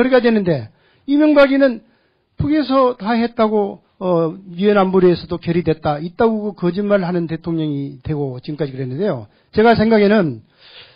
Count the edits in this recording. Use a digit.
1